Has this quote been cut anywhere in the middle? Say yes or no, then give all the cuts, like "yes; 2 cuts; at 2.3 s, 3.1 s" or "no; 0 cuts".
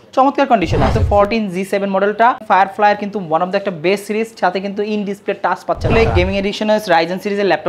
yes; 3 cuts; at 1.0 s, 2.4 s, 5.9 s